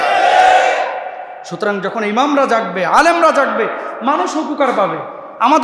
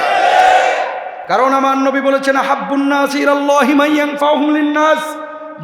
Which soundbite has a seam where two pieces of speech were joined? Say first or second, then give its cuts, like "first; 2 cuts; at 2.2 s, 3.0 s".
second; 1 cut; at 1.1 s